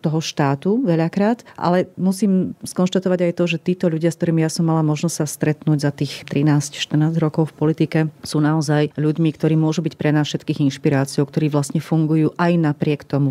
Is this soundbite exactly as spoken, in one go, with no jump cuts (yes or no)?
yes